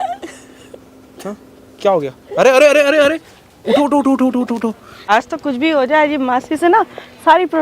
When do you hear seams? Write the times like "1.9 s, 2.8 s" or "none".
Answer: 4.9 s